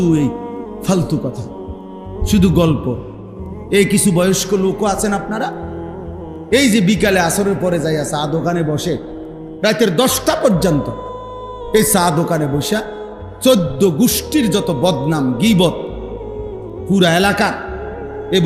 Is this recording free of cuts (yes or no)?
yes